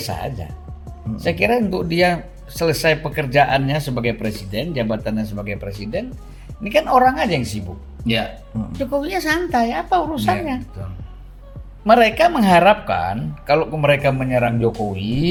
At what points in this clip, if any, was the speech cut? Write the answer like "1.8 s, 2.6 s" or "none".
none